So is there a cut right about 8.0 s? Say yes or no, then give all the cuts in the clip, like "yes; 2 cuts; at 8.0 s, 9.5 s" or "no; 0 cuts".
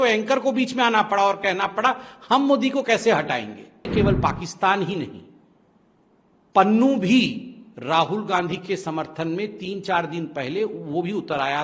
no; 1 cut; at 3.9 s